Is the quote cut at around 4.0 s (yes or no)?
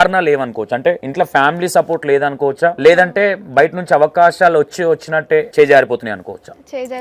no